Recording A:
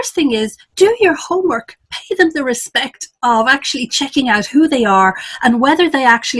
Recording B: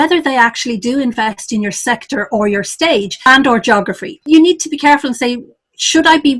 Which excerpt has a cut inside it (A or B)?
B